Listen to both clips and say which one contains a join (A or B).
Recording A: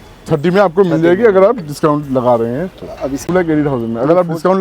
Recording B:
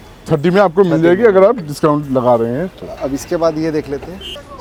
A